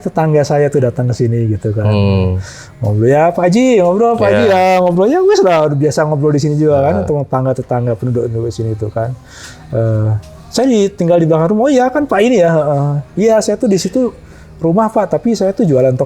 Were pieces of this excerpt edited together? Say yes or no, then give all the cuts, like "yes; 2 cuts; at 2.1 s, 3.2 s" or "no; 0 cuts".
no; 0 cuts